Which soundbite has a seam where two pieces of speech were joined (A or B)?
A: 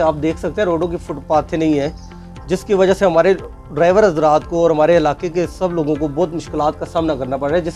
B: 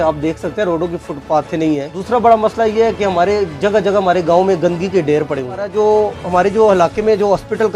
B